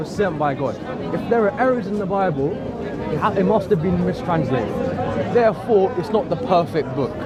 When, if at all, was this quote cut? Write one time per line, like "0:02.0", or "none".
none